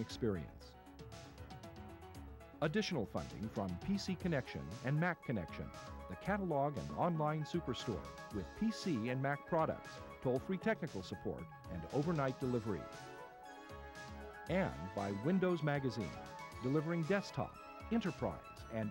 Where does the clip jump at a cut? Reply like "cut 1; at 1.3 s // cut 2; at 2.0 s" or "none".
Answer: cut 1; at 0.8 s // cut 2; at 2.6 s